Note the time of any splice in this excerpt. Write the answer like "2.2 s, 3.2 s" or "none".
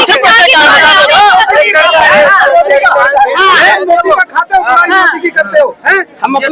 none

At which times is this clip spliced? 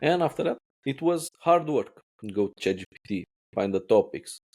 1.1 s

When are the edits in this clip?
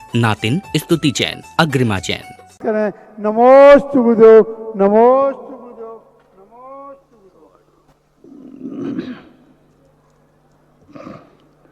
2.5 s

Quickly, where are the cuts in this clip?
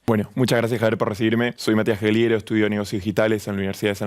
1.6 s

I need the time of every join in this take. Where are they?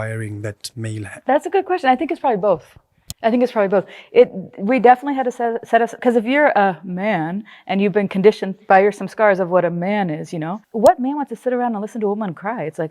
10.6 s

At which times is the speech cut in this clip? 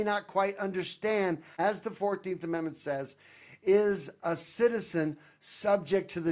1.5 s

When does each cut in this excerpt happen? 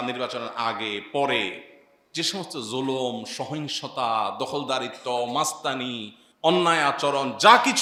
none

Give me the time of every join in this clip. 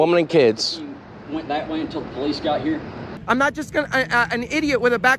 3.1 s

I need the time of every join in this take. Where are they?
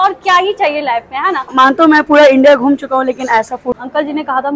1.5 s, 3.8 s

